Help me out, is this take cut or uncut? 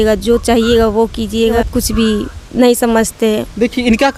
uncut